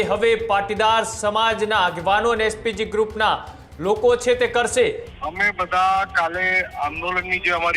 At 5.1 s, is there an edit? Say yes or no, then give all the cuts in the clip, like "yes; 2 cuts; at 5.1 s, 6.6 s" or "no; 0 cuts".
yes; 1 cut; at 5.1 s